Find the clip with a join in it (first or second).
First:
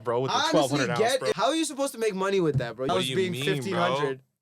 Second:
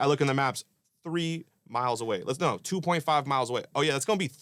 first